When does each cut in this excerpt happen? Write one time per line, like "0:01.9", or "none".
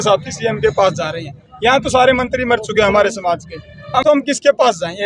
0:04.0